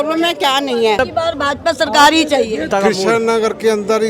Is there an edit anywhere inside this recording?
yes; 2 cuts; at 1.0 s, 2.7 s

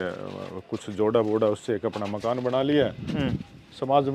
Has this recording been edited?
no; 0 cuts

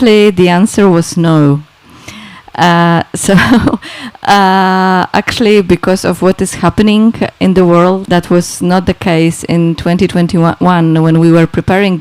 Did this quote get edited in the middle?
yes; 1 cut; at 8.0 s

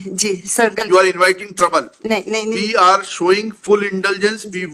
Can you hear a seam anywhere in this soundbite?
no; 0 cuts

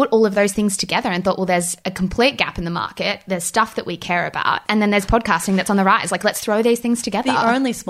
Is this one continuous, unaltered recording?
no; 2 cuts; at 1.8 s, 4.6 s

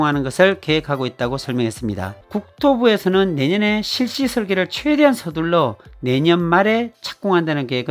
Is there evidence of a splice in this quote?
yes; 1 cut; at 2.2 s

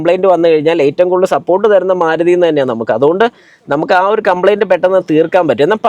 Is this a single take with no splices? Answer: yes; 0 cuts

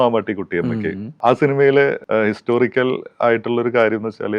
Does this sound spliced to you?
yes; 2 cuts; at 1.1 s, 2.0 s

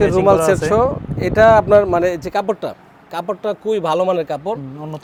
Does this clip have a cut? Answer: no; 0 cuts

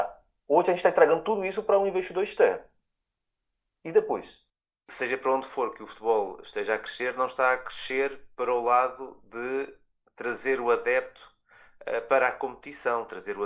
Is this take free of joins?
no; 1 cut; at 4.9 s

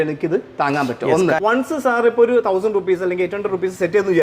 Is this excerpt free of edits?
no; 1 cut; at 1.6 s

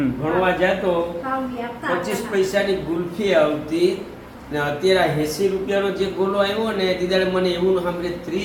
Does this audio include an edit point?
no; 0 cuts

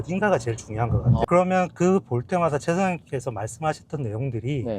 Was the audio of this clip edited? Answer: yes; 1 cut; at 1.3 s

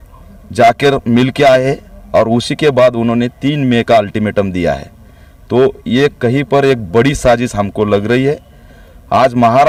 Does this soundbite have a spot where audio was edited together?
no; 0 cuts

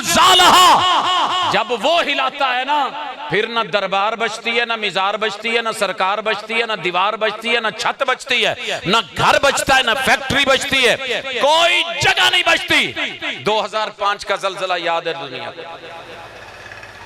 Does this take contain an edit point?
no; 0 cuts

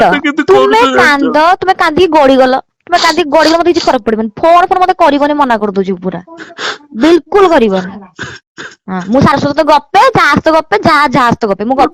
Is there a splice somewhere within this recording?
no; 0 cuts

